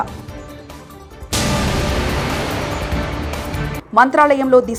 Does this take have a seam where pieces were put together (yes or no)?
no